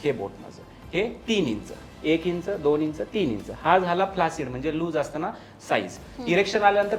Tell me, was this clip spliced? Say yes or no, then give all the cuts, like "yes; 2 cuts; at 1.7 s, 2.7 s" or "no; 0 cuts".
no; 0 cuts